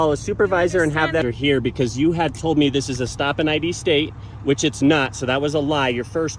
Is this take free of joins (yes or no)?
no